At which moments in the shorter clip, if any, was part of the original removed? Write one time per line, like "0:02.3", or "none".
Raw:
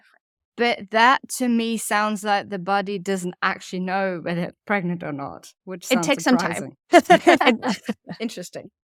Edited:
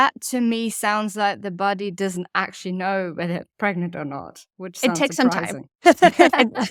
none